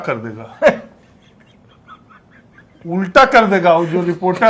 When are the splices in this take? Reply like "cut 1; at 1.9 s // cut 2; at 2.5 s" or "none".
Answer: cut 1; at 2.7 s